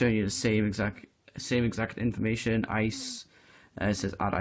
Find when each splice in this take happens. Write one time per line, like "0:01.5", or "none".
0:01.4